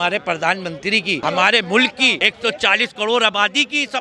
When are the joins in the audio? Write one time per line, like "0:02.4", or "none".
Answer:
0:01.2
0:02.2